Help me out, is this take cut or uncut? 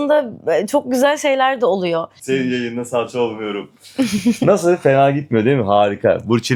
uncut